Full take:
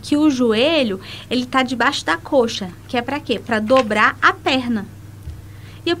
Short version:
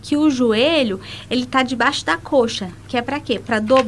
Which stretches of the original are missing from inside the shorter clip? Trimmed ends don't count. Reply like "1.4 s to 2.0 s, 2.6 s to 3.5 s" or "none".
none